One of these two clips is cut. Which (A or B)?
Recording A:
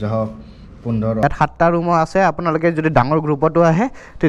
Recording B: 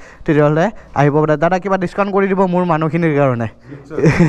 A